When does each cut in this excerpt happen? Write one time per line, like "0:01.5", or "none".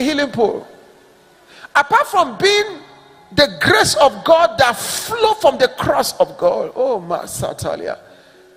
none

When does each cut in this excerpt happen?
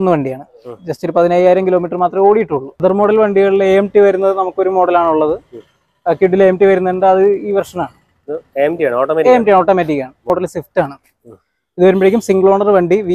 0:02.8
0:10.3

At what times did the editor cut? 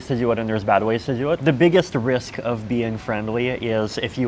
0:01.4

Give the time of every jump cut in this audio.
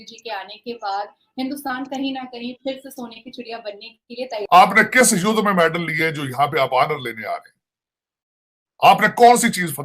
0:04.3

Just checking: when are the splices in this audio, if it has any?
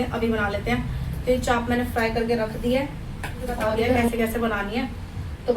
0:04.0

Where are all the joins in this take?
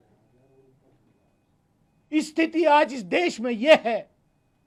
none

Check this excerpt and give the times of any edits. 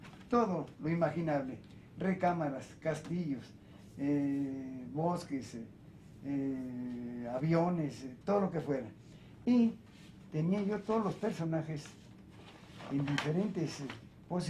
none

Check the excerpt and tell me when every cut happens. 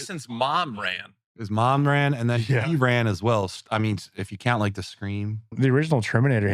0:05.5

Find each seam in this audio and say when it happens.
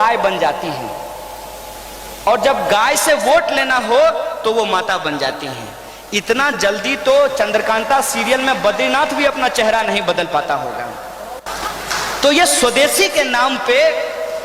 0:11.4

